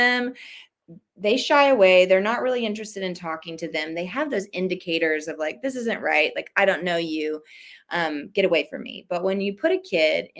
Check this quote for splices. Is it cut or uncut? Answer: uncut